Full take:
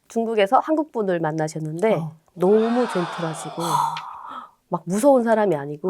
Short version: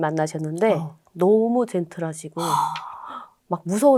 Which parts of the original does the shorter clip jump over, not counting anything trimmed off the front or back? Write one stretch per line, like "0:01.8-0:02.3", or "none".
none